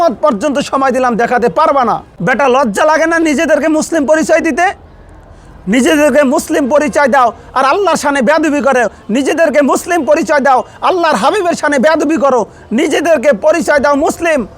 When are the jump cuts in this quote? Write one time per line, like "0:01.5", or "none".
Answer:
0:02.1